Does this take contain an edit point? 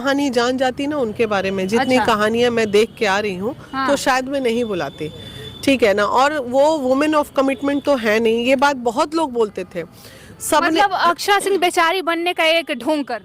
no; 0 cuts

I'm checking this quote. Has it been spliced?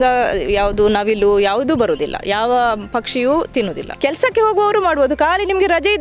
yes; 1 cut; at 3.9 s

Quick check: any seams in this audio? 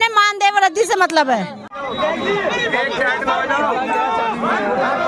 no; 0 cuts

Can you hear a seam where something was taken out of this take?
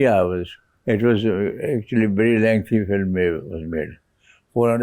no; 0 cuts

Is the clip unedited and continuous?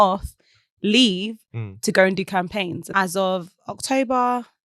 no; 1 cut; at 2.9 s

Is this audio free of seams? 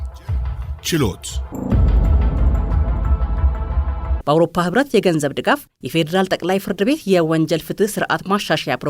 no; 2 cuts; at 1.4 s, 4.2 s

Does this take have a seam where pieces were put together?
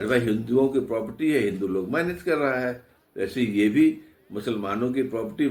no; 0 cuts

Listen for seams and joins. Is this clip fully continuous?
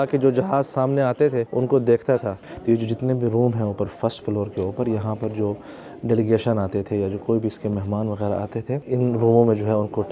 no; 3 cuts; at 1.5 s, 2.4 s, 8.8 s

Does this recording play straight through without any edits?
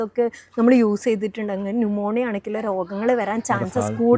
yes; 0 cuts

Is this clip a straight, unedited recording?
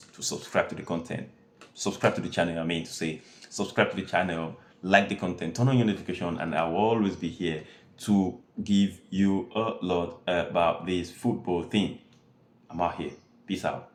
yes; 0 cuts

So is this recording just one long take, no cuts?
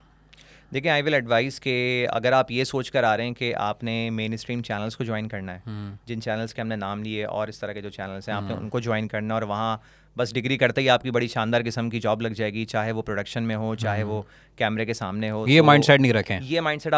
yes; 0 cuts

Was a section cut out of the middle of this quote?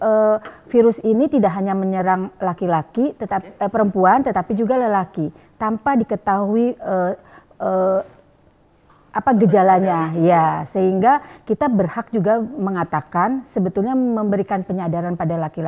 no; 0 cuts

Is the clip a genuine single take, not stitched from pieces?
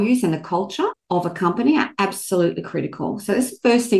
no; 1 cut; at 1.0 s

